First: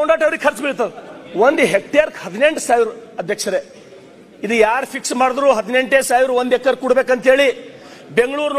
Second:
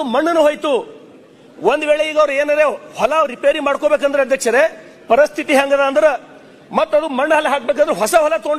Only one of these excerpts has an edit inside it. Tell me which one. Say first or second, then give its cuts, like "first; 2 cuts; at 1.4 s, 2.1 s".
first; 1 cut; at 1.2 s